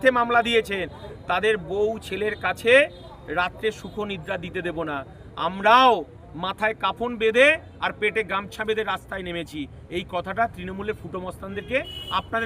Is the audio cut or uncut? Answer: uncut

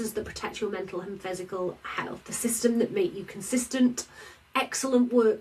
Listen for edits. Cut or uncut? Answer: uncut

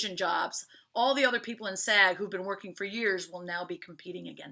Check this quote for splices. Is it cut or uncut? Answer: uncut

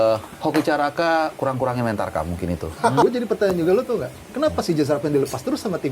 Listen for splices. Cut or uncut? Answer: cut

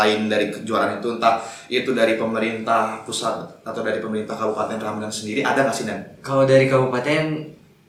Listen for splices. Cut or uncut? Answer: uncut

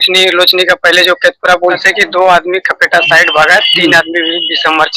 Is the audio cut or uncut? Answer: cut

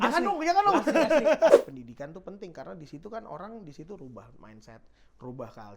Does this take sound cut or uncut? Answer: cut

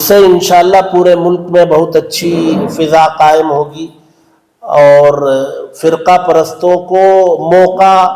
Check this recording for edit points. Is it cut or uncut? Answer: uncut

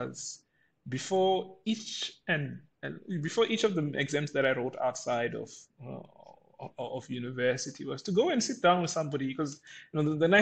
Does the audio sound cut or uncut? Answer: uncut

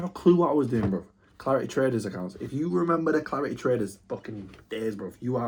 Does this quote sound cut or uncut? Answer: uncut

